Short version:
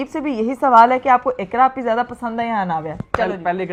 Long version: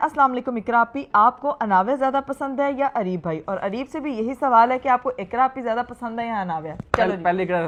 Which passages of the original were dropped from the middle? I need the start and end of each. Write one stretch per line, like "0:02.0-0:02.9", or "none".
none